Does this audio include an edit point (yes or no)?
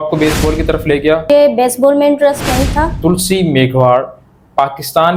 yes